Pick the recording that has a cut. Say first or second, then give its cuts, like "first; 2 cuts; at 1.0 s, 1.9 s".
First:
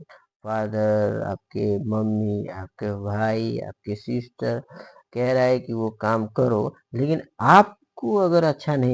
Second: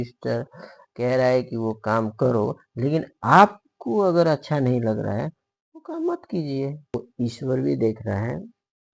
second; 1 cut; at 6.9 s